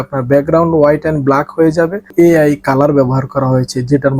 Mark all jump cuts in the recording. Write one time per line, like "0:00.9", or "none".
0:02.1